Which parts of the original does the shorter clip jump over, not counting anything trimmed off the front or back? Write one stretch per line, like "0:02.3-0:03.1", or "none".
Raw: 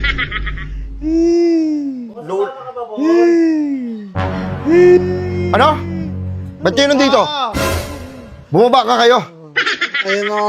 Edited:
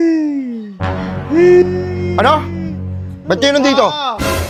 none